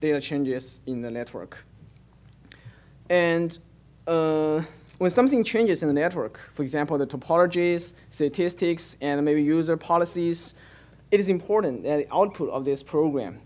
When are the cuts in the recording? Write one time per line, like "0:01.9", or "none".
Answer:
none